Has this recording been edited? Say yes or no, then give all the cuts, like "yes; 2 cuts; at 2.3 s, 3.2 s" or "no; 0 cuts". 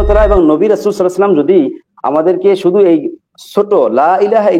no; 0 cuts